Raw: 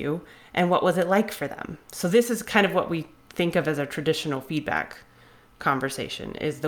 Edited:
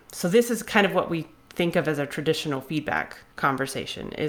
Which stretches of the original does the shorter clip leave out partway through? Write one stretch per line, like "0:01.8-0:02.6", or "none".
0:05.0-0:05.4